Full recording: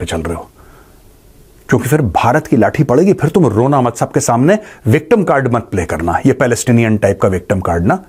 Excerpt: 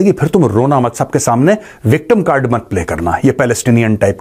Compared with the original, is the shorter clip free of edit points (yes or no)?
yes